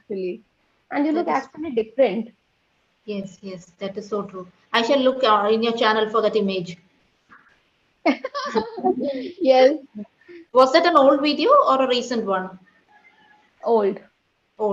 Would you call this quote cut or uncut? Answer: uncut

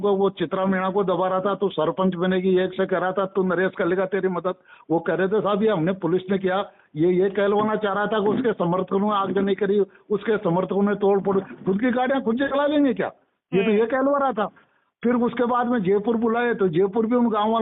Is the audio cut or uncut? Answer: uncut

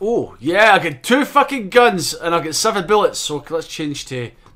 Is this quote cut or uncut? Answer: uncut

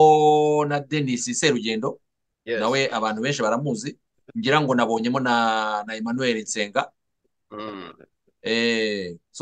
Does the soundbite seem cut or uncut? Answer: uncut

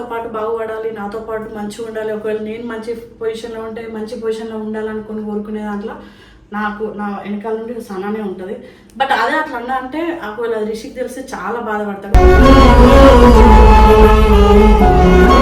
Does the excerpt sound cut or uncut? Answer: uncut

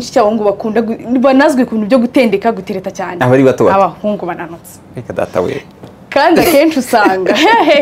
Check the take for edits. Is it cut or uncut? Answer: uncut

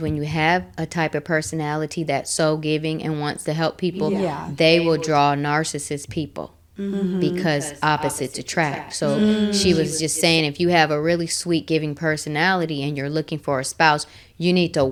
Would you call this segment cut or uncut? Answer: uncut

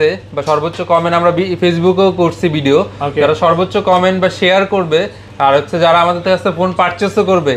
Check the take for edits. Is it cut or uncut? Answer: uncut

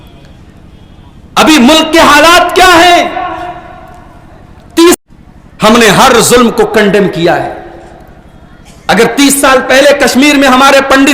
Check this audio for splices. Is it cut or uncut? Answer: cut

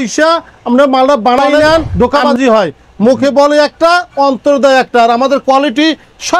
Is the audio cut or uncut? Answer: cut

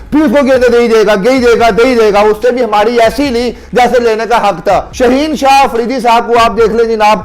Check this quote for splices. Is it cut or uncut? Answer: cut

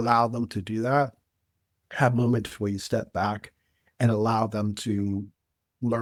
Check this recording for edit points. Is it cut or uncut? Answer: uncut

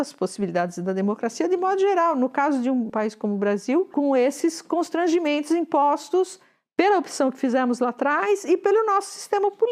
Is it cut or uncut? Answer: cut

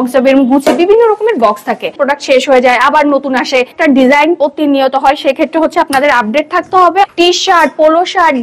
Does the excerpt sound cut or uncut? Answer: cut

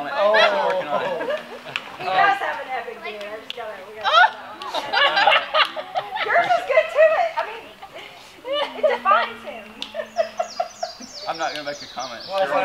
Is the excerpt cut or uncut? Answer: uncut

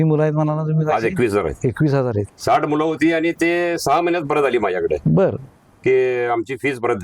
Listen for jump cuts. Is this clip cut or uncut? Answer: cut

